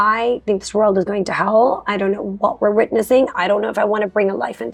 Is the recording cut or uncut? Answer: uncut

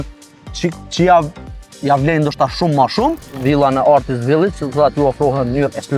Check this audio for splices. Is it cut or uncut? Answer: cut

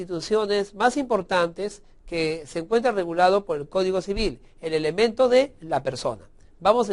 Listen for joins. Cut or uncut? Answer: cut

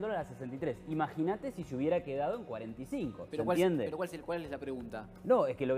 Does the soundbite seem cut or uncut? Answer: uncut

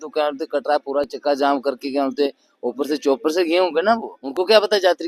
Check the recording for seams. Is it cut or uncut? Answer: cut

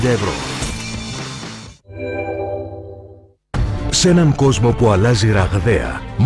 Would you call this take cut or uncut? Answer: cut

